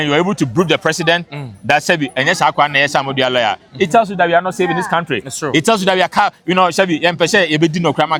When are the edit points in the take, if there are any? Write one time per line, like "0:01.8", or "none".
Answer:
none